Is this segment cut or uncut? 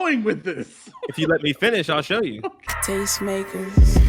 cut